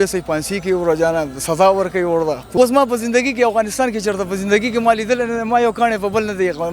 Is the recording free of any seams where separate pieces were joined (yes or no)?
no